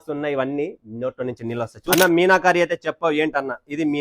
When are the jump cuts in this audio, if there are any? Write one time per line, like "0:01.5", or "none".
0:01.9